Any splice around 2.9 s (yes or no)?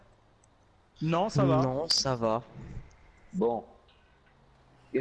yes